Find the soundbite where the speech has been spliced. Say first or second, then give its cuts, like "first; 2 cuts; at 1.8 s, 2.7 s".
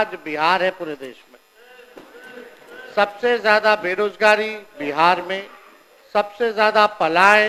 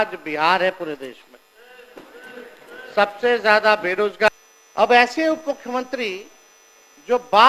second; 1 cut; at 4.3 s